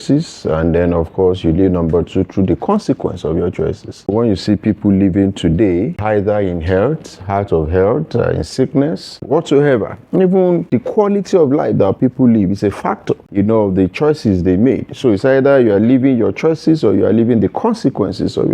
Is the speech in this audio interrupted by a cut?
yes; 5 cuts; at 4.1 s, 6.0 s, 9.2 s, 10.7 s, 13.3 s

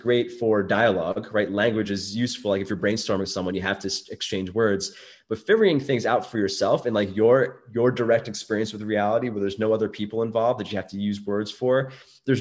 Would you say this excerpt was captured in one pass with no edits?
yes; 0 cuts

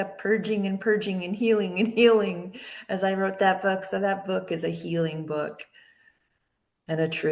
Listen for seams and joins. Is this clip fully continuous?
yes; 0 cuts

